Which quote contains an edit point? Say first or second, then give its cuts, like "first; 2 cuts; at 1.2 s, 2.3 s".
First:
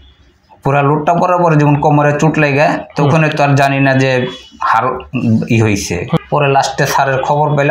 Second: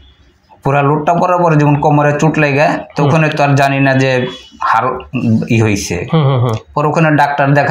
first; 1 cut; at 6.2 s